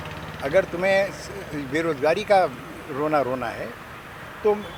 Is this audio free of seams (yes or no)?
yes